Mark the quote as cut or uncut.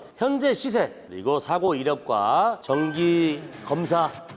cut